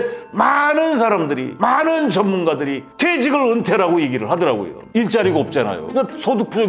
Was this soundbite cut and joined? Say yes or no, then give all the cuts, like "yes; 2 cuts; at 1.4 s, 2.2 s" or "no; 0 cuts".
yes; 1 cut; at 4.9 s